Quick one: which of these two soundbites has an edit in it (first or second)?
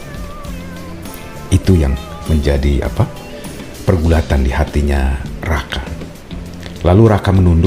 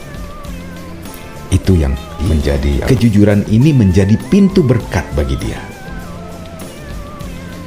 second